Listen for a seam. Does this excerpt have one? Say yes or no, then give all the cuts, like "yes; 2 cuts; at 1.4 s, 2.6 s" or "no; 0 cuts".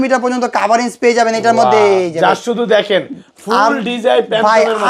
no; 0 cuts